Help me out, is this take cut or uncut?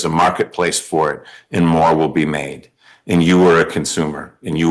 uncut